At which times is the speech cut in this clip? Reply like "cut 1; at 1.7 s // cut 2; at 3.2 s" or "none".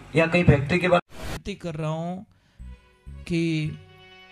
cut 1; at 1.1 s